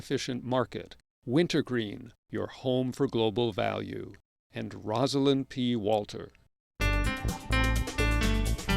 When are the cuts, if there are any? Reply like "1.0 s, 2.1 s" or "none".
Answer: 6.6 s